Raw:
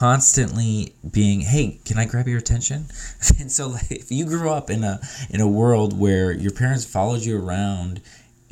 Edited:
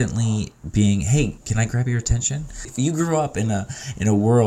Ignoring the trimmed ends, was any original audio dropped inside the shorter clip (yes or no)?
yes